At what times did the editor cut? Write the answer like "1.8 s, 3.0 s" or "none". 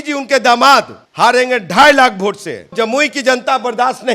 1.0 s, 2.7 s